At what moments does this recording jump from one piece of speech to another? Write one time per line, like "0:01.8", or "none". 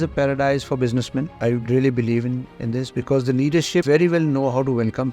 0:01.3
0:03.8

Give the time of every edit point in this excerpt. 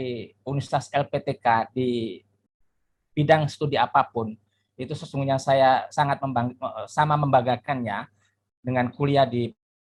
none

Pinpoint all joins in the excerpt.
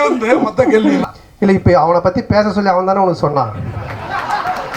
0:01.0

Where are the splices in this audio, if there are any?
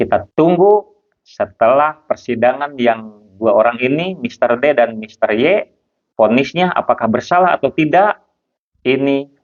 none

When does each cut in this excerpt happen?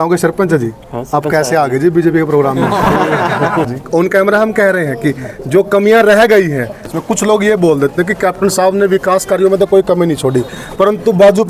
0:03.7
0:06.9

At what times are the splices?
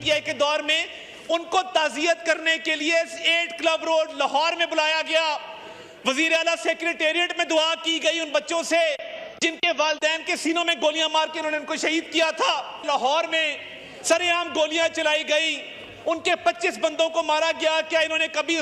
0:12.7

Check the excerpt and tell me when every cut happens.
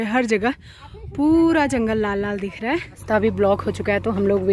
0:03.0

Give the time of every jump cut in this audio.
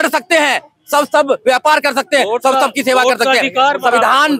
none

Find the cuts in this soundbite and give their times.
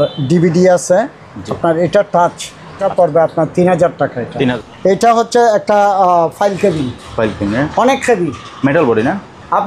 0:02.8
0:04.5

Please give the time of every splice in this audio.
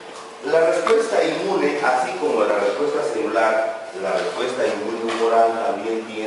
0:02.3

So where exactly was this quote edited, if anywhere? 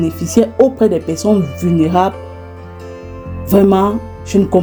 none

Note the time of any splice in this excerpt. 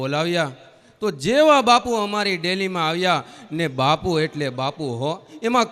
none

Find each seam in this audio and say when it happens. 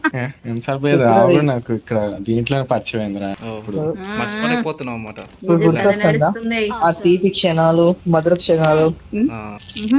0:03.4

